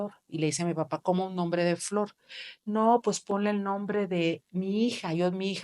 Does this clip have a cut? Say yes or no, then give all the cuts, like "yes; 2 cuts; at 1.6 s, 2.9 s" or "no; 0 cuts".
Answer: no; 0 cuts